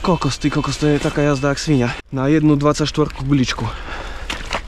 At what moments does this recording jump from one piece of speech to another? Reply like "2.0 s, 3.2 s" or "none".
2.0 s